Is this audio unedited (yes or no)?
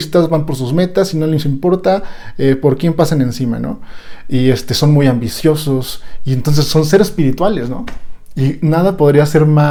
yes